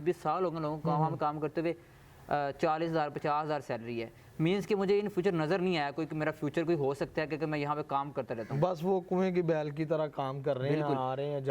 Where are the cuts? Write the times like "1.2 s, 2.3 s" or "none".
none

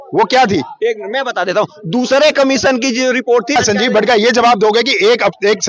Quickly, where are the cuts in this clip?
3.6 s

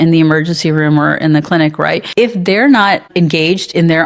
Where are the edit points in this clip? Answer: 2.0 s, 3.1 s

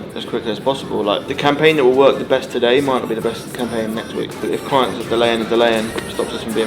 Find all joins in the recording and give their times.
1.3 s, 4.4 s

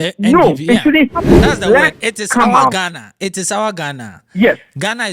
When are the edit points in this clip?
1.5 s

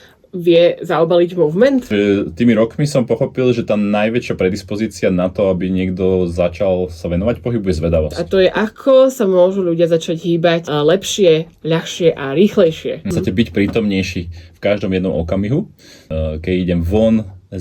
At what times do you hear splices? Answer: 1.9 s, 8.2 s, 10.7 s, 13.1 s, 16.1 s

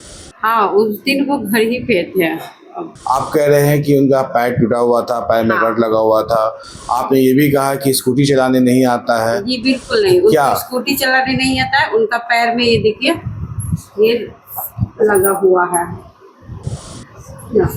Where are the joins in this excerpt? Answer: 2.9 s

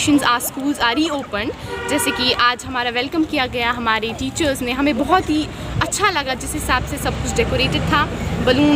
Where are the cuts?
none

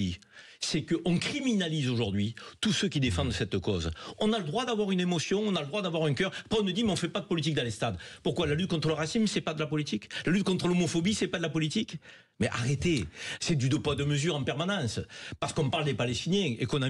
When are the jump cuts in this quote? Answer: none

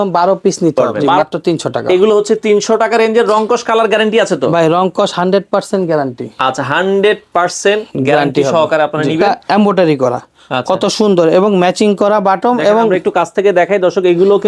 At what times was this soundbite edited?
1.0 s, 9.4 s

